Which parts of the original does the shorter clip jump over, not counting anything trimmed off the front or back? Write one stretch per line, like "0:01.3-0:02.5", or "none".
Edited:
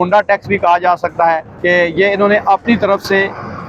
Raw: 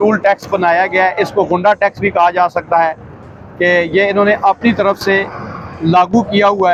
0:03.0-0:03.5